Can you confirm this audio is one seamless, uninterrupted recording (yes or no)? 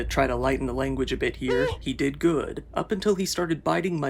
no